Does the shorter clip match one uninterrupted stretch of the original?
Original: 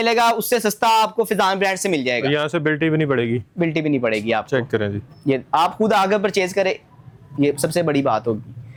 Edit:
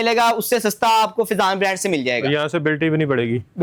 yes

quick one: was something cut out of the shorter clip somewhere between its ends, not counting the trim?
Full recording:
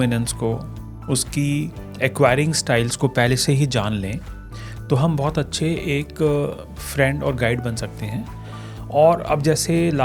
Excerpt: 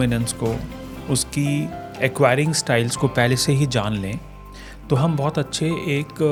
no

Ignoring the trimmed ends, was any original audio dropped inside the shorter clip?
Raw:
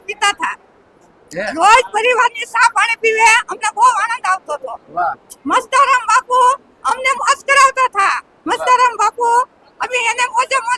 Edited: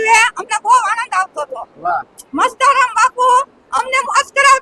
no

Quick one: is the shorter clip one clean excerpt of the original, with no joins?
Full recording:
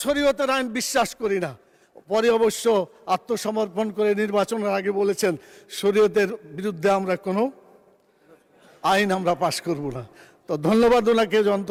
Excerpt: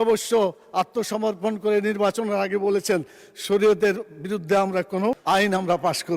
no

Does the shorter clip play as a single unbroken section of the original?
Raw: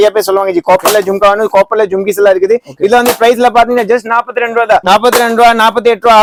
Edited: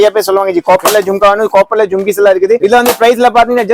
no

